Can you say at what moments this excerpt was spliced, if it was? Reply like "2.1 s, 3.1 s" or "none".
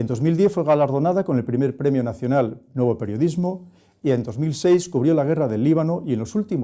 4.3 s